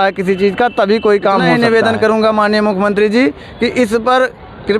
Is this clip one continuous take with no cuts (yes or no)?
no